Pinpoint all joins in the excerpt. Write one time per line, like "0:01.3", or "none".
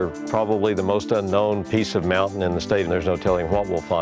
0:02.9